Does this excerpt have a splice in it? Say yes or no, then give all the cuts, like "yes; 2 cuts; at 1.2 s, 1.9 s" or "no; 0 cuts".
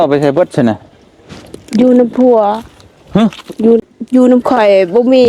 yes; 1 cut; at 3.8 s